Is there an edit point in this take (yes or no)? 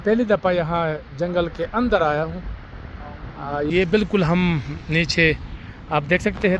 yes